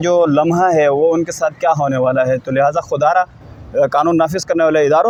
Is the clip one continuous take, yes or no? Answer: yes